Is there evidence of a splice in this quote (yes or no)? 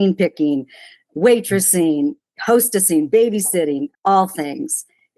yes